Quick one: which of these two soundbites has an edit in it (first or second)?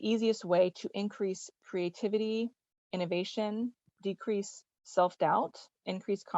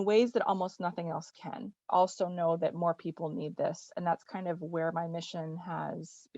second